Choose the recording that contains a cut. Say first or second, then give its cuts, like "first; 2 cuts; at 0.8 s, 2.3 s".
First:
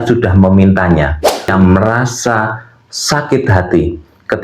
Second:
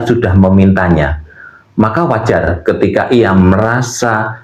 first; 1 cut; at 1.5 s